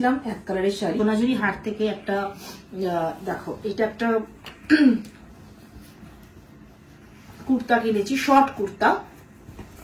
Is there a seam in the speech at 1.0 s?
yes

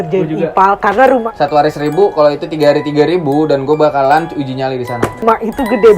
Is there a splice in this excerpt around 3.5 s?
no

